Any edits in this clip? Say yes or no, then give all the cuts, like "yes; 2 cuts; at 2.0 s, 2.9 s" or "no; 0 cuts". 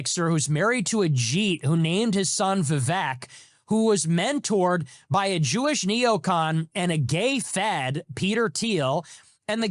no; 0 cuts